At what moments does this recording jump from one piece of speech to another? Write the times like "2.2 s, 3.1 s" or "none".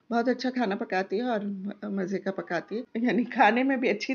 2.8 s